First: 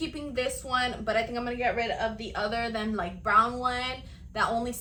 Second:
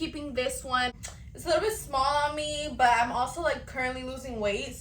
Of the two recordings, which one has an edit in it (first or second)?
second